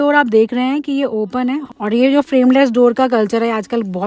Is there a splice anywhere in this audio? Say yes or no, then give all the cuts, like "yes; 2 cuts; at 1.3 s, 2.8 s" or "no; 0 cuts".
yes; 1 cut; at 1.7 s